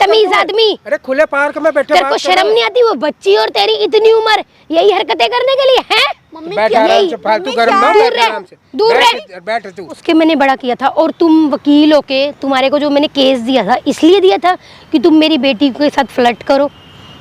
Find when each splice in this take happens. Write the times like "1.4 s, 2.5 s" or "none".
10.0 s

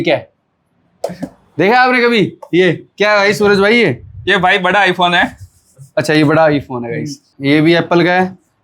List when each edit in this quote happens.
7.3 s

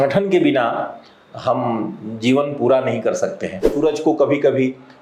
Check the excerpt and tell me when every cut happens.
3.7 s

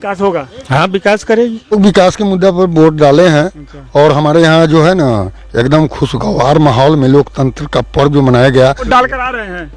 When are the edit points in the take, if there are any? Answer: 1.7 s, 8.8 s

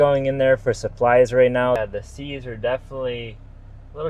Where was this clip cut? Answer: 1.8 s

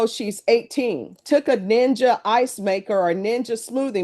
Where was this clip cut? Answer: 1.2 s

